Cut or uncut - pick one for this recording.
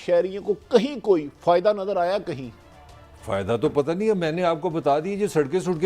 uncut